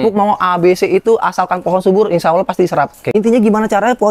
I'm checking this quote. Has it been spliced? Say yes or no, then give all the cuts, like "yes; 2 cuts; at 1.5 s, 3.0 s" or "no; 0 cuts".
yes; 1 cut; at 3.0 s